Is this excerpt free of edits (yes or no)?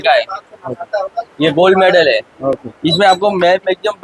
yes